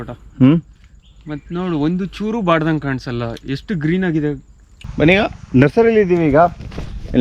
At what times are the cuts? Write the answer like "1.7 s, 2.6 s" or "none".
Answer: 4.9 s